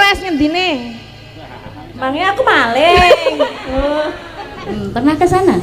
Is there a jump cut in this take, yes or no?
yes